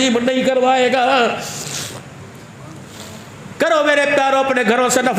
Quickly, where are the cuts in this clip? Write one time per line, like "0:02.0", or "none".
0:02.5